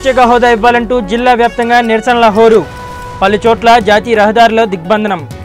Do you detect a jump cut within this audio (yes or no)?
no